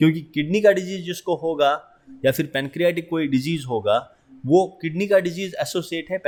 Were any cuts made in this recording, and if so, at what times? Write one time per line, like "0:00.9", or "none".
none